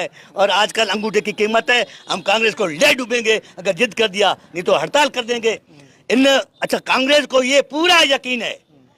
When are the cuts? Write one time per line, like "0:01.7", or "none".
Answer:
0:05.7

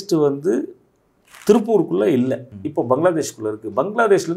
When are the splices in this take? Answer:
0:02.5

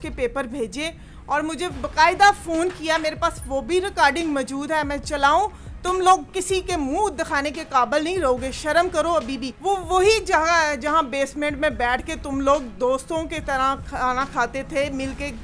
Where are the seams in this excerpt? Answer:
0:09.4

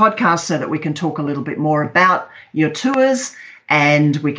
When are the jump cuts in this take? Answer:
none

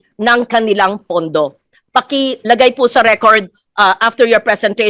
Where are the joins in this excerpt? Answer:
none

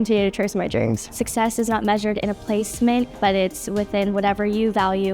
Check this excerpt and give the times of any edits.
0:01.1
0:03.1

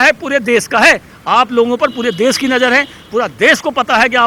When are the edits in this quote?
0:01.1

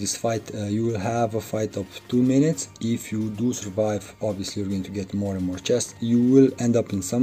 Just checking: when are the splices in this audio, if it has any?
0:05.9

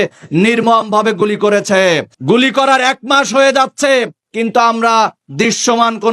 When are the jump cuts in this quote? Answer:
none

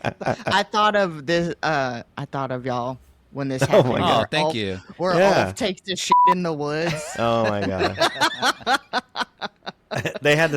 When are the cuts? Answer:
0:02.1

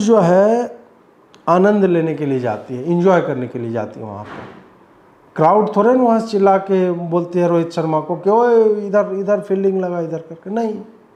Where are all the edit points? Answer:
none

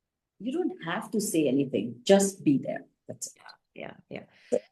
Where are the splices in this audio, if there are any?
none

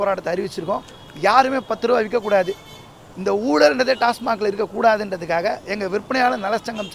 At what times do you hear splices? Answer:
none

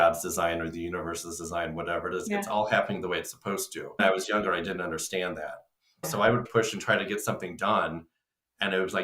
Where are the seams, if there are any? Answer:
0:04.0
0:06.5

